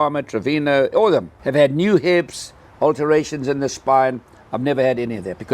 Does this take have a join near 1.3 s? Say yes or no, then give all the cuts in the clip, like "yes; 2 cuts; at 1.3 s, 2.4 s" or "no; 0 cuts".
yes; 1 cut; at 1.3 s